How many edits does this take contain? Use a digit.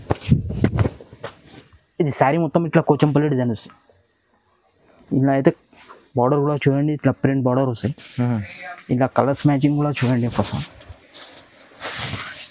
0